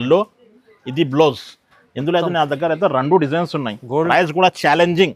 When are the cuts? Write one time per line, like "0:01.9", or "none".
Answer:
0:04.1